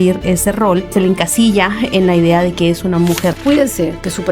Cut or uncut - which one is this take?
cut